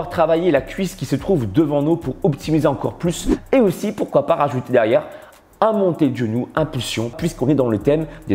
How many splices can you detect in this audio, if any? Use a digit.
2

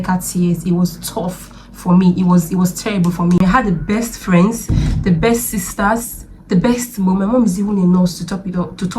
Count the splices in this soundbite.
1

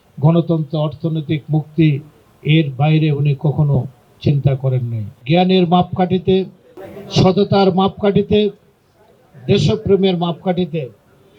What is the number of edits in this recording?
1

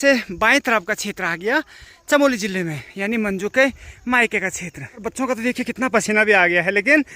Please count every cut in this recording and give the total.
1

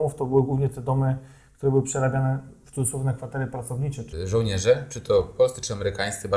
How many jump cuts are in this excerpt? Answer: 1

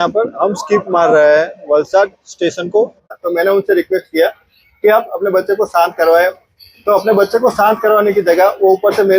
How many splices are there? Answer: 1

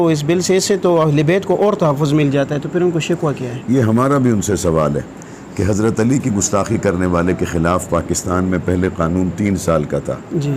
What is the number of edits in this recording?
0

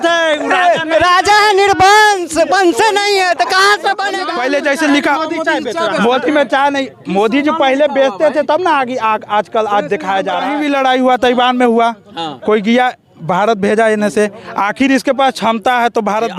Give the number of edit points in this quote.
2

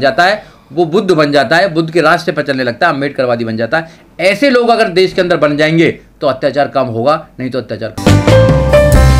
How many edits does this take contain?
1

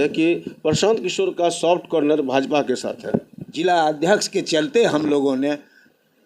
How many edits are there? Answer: 1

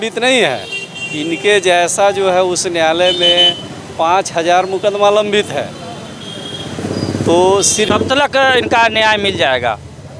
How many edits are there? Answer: 1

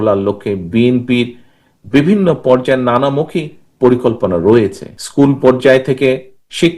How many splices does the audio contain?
1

